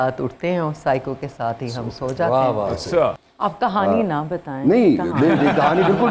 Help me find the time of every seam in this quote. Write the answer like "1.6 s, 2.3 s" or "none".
3.3 s